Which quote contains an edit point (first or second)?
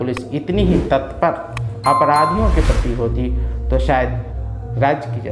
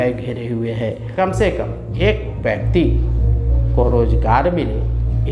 second